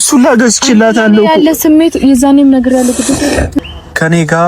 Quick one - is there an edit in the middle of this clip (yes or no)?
yes